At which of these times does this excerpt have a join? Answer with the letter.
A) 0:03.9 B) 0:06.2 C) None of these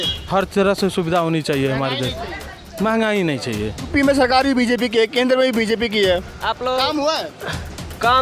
A